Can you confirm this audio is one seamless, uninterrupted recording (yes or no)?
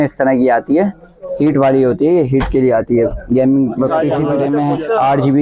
no